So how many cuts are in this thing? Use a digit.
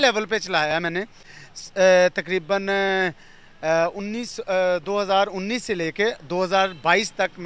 0